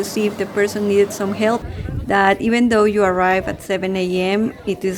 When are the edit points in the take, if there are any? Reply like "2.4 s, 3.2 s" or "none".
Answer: 1.6 s